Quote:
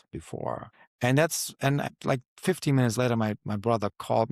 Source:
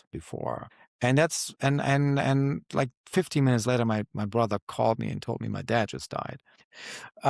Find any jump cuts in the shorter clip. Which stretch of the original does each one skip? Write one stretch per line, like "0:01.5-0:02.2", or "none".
0:01.9-0:02.5